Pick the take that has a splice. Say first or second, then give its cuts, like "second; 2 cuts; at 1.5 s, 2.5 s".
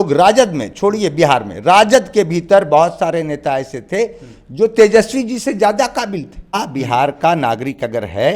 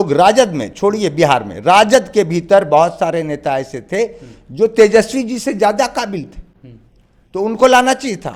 first; 1 cut; at 6.6 s